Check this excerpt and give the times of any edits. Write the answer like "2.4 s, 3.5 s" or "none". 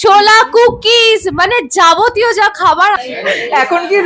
3.0 s